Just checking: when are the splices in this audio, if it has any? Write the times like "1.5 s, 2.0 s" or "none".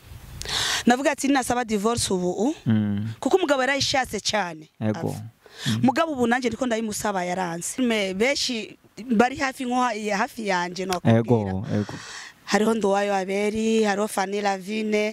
7.8 s